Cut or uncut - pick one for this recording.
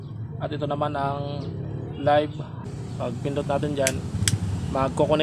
cut